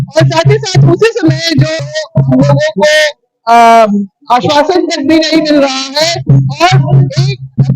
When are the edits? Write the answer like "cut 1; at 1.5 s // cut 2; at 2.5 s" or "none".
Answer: cut 1; at 1.9 s